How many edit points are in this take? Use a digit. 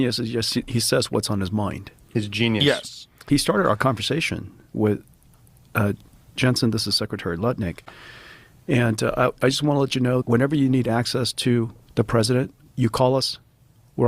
4